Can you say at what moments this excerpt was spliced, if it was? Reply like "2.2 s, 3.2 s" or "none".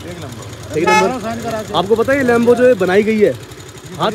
none